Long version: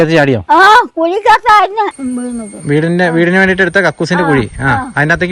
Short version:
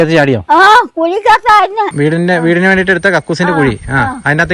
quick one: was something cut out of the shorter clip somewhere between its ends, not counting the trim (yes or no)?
yes